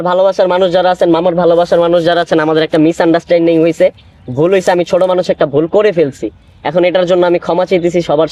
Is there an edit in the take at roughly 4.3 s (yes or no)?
no